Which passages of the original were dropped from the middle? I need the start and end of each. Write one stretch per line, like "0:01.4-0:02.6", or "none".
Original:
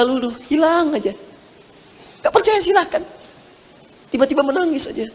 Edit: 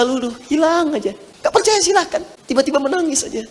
0:01.3-0:02.1
0:03.2-0:04.0